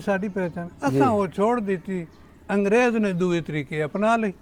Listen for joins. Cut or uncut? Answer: uncut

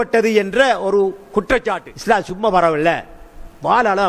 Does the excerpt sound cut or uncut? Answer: cut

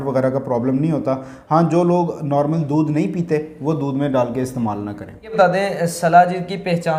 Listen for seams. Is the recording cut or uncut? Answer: uncut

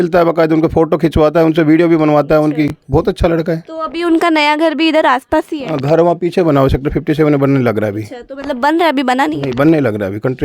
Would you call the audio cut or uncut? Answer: uncut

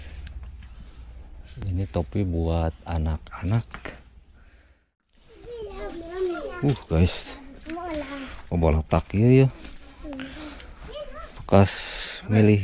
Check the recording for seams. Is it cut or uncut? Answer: cut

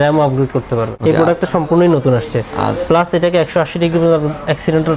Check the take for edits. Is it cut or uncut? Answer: cut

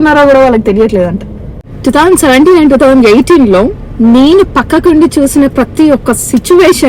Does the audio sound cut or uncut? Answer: cut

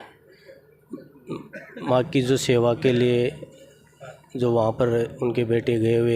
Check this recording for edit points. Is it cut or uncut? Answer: uncut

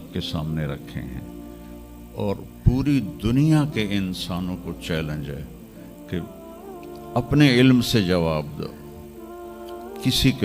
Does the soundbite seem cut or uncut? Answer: uncut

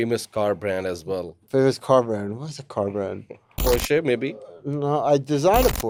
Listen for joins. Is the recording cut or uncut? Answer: uncut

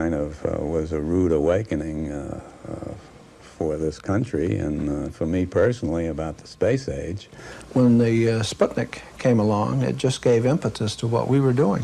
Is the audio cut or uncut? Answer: cut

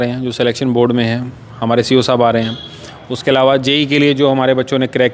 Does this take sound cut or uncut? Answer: uncut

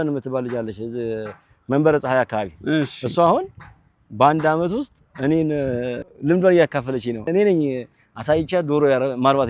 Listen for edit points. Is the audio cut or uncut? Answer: uncut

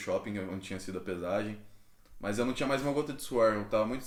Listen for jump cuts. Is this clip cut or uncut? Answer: uncut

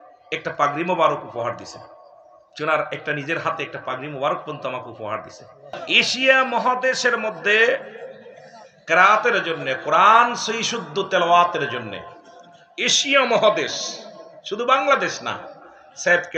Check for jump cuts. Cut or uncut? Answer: cut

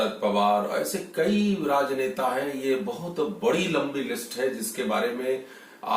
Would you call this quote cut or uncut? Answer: uncut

